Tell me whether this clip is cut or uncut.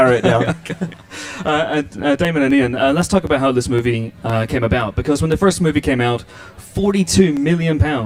uncut